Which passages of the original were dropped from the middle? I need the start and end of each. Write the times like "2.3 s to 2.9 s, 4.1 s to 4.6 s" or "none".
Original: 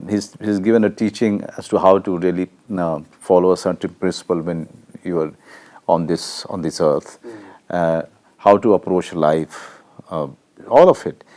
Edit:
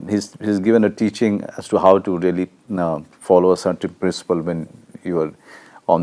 none